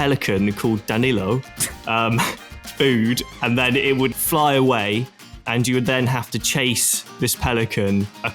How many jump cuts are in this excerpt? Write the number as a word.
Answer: zero